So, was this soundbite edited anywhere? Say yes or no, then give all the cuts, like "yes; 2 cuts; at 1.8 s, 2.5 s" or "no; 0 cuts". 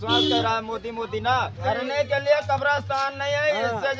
yes; 1 cut; at 1.6 s